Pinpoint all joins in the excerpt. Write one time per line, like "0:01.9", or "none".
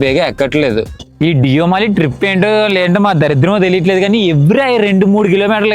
0:01.0